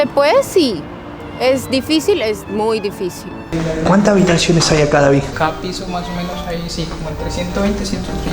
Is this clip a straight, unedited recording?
no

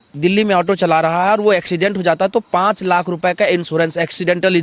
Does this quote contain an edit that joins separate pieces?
no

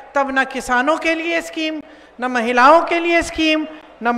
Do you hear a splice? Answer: no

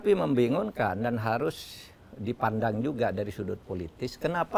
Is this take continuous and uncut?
yes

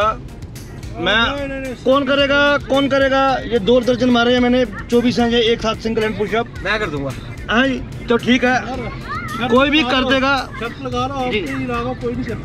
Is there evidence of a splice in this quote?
no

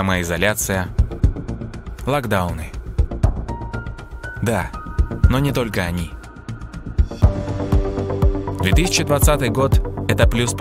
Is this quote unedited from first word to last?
yes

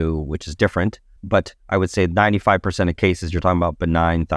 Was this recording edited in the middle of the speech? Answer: yes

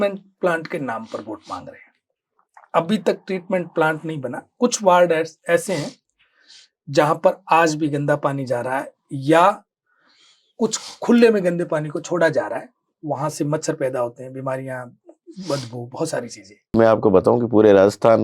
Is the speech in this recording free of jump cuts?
no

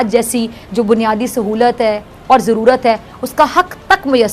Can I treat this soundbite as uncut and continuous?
yes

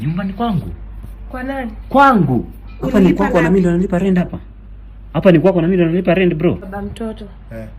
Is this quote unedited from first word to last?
no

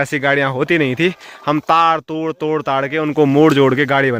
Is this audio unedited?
yes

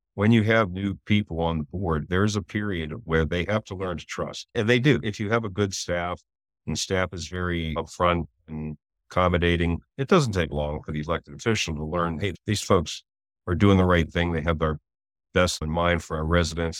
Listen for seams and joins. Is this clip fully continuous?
no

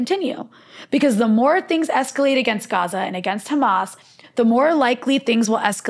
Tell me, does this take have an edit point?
no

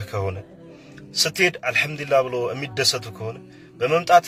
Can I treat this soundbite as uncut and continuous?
yes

